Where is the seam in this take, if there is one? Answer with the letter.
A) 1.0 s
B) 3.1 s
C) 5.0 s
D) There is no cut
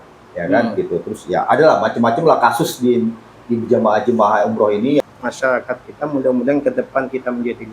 C